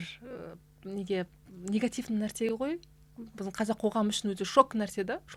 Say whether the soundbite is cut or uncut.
uncut